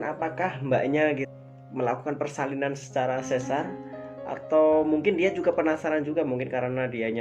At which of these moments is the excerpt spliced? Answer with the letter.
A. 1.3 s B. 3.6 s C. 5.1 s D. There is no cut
A